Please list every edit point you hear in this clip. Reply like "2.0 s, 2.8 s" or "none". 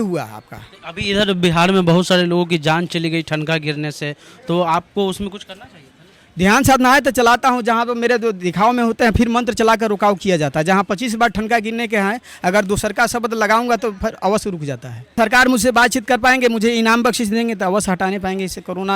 15.2 s